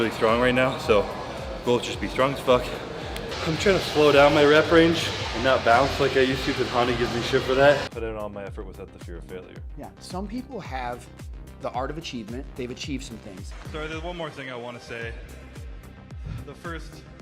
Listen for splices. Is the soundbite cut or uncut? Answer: uncut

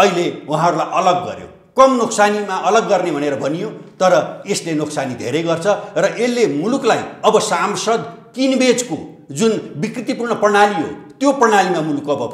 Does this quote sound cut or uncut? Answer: uncut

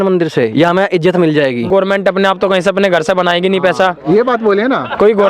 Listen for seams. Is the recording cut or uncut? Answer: cut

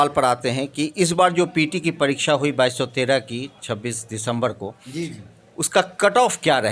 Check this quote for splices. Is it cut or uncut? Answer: uncut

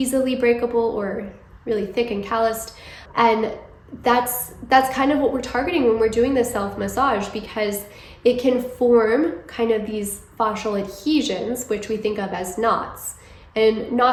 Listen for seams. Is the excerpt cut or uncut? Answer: uncut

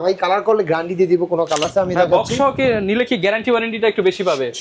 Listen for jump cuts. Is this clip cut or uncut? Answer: cut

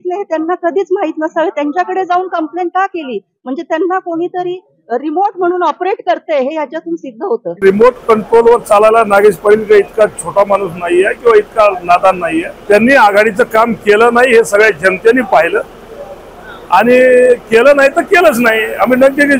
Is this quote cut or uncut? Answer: cut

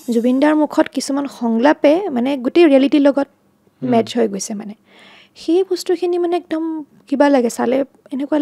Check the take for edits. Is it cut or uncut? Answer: uncut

